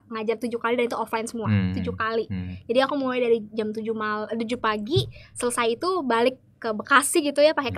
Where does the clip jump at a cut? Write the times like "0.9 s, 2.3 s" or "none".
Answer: none